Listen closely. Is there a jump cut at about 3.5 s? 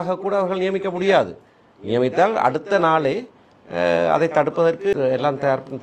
no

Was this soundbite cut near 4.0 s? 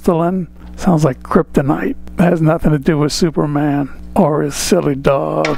yes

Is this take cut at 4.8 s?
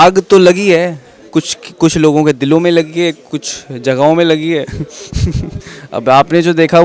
no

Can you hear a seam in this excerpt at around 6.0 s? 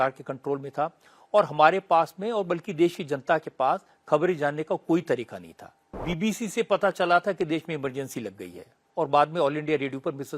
yes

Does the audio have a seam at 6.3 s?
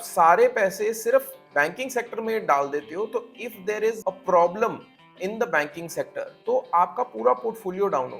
yes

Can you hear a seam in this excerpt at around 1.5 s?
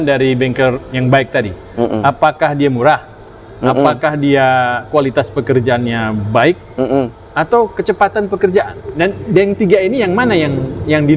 no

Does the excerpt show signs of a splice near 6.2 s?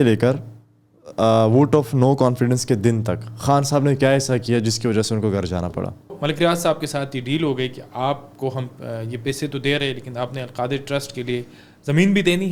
yes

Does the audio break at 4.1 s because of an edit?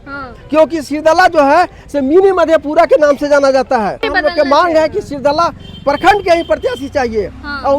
yes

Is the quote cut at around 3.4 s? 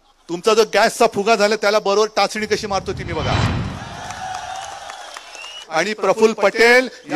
no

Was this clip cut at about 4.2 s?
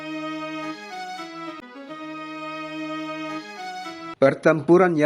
yes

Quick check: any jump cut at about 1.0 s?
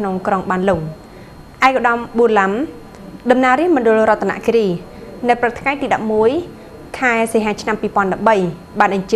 no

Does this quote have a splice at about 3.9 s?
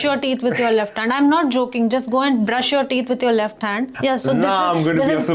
yes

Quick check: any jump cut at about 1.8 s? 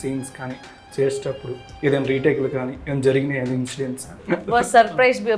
no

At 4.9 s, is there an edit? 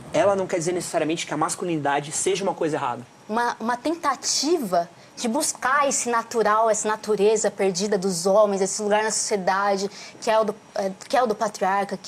no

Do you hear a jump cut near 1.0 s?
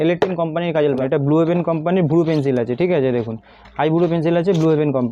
yes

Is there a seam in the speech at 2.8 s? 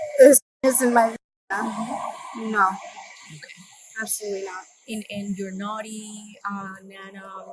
no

